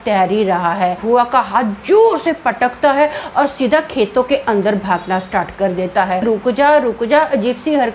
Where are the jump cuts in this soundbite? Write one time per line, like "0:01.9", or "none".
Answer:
0:01.0
0:06.2